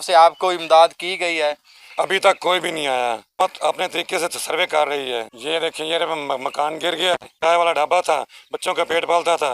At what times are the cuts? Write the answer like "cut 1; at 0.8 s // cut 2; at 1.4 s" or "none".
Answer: cut 1; at 5.3 s // cut 2; at 7.3 s